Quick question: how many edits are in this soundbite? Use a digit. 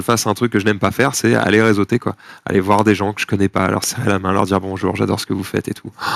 0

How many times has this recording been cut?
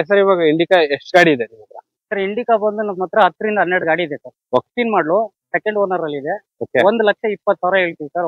1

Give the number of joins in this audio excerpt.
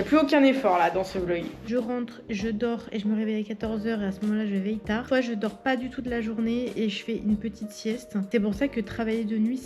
1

